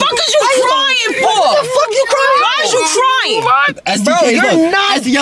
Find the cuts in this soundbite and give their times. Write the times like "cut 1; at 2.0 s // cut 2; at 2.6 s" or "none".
cut 1; at 3.7 s